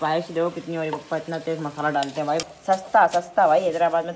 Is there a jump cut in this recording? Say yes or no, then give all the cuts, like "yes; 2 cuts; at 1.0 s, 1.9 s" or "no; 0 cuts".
yes; 1 cut; at 2.5 s